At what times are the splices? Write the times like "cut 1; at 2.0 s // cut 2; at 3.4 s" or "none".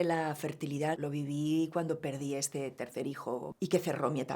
cut 1; at 0.9 s // cut 2; at 3.5 s